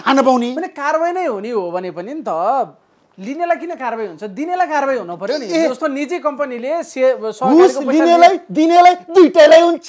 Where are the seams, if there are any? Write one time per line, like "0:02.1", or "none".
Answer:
none